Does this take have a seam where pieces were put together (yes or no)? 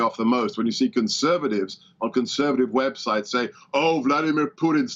no